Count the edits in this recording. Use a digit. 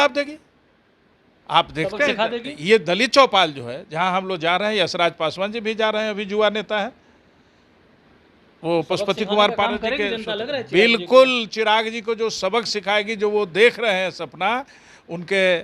0